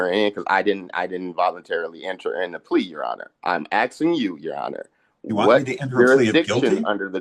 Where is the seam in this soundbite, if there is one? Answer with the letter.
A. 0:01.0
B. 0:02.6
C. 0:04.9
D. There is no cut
D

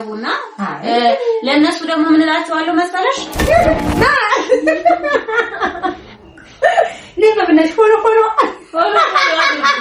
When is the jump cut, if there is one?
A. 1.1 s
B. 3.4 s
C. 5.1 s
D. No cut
B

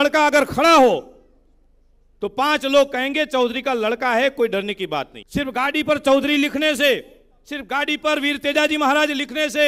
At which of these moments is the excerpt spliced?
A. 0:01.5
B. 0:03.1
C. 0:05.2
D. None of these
C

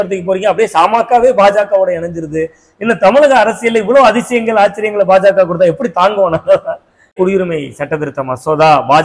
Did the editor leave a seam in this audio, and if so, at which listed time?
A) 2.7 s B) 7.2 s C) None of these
B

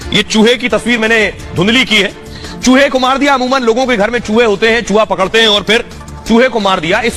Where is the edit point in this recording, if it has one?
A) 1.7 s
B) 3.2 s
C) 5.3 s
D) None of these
D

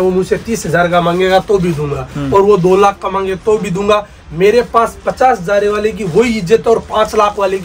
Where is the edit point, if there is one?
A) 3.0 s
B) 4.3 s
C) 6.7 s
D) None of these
D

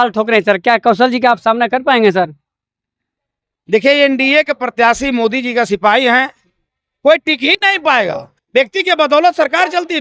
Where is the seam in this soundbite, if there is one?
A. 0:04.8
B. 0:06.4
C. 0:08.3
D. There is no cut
C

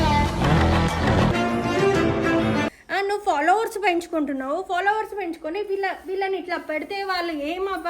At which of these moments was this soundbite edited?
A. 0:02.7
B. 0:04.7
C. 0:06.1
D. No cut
A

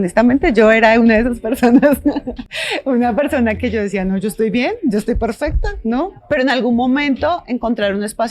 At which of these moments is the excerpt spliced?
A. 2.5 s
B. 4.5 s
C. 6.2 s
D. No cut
C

